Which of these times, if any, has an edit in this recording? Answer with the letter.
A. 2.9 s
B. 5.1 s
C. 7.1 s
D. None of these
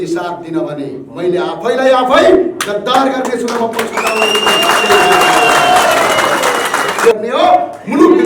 C